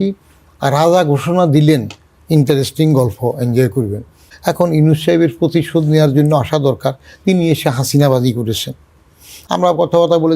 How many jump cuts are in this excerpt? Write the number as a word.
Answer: two